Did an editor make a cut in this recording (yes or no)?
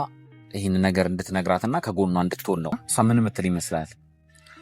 yes